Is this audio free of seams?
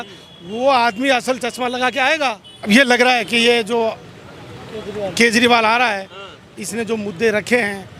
no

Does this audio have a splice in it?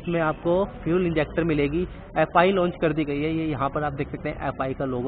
no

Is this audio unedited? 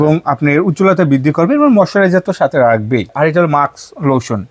no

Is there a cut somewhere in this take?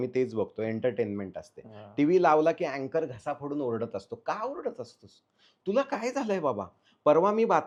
no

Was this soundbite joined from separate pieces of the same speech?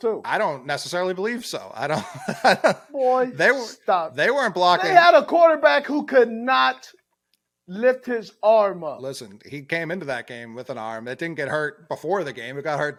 no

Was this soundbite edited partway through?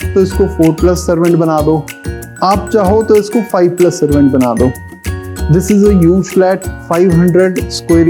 no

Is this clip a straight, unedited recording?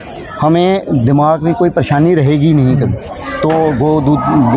yes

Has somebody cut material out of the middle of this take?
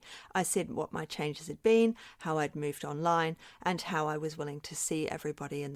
no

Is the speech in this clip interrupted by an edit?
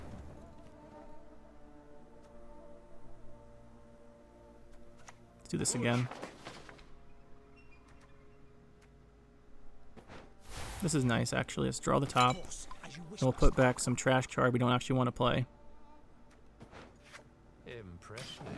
no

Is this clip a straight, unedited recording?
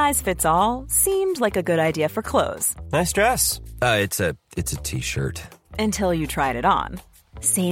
yes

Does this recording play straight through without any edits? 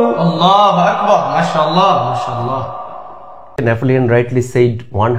no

